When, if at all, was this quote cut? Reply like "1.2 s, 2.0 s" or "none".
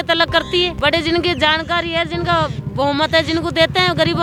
none